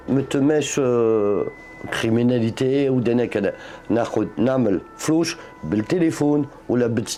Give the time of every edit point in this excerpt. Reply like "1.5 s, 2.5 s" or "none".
none